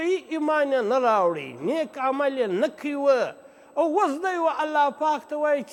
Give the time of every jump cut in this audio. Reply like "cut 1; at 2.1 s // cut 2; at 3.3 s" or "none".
none